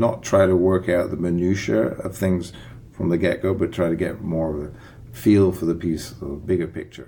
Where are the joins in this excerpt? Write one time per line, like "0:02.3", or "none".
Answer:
none